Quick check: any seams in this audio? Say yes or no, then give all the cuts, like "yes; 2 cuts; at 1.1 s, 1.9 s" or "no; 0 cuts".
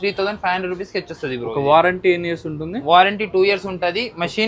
no; 0 cuts